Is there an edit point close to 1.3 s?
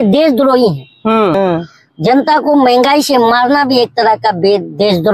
yes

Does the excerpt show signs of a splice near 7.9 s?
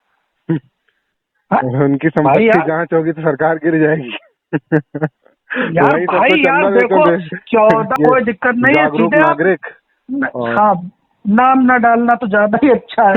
yes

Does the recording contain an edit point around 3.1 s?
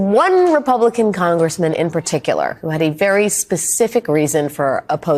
no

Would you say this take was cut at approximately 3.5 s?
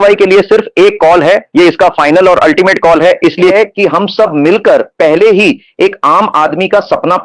yes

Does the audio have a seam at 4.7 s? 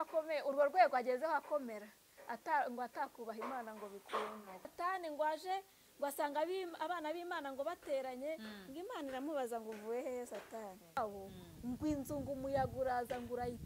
yes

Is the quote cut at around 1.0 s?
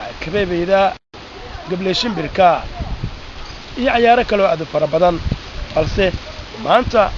yes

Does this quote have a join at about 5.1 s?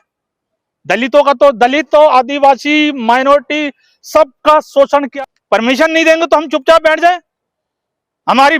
yes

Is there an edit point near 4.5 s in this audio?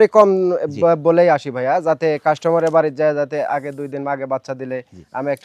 no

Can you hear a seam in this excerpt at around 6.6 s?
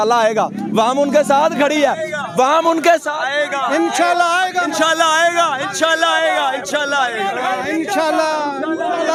no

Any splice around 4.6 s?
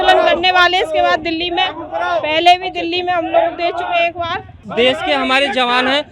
yes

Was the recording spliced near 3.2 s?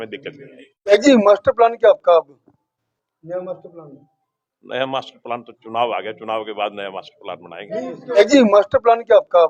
no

